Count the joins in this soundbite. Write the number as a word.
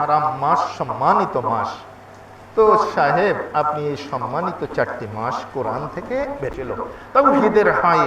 one